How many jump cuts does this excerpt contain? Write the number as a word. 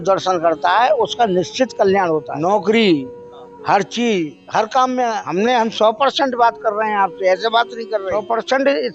three